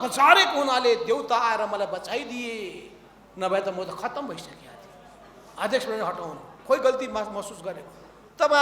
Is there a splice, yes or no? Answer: no